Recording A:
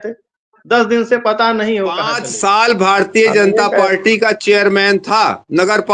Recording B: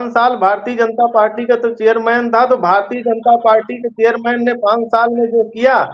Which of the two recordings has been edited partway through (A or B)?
A